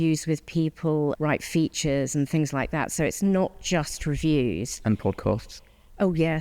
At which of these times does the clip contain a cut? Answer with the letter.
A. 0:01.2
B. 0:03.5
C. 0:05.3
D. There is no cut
A